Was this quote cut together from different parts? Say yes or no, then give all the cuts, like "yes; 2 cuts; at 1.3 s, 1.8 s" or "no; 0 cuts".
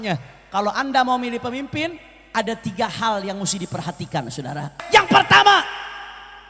yes; 1 cut; at 4.8 s